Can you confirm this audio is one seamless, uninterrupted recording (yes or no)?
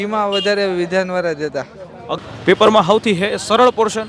no